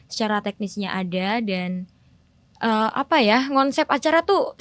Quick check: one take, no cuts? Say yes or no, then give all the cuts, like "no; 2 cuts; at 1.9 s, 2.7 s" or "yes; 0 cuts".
yes; 0 cuts